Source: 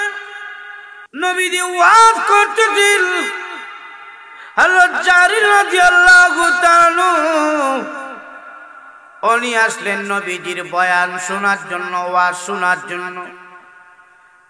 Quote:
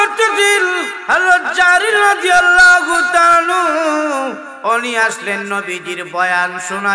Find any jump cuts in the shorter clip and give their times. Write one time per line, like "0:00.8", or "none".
0:00.9
0:04.5